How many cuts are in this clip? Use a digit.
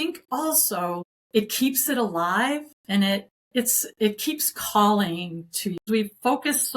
3